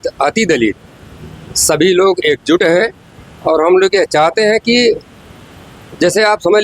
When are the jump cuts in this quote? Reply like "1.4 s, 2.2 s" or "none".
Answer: none

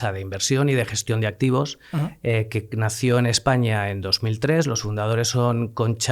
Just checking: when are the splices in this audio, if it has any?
none

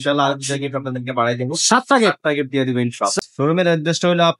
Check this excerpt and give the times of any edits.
3.2 s

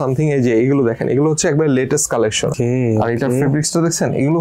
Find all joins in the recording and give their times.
2.5 s

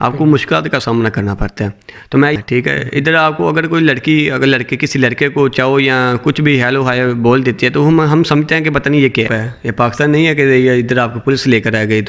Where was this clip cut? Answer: 2.4 s, 9.4 s

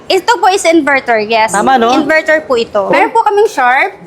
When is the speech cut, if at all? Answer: 2.9 s

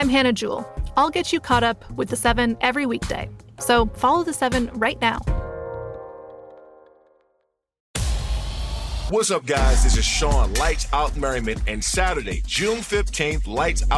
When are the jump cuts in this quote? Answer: 7.9 s

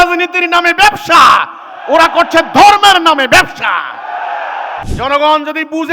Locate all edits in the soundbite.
4.8 s

